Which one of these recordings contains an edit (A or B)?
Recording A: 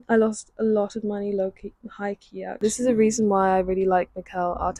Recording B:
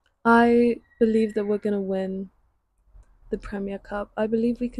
A